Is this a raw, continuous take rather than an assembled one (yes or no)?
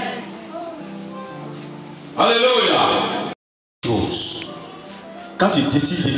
no